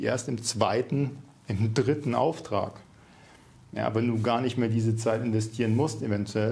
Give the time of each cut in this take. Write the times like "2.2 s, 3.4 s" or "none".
none